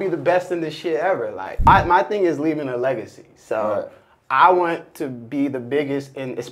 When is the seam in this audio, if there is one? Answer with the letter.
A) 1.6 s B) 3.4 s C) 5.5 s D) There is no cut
A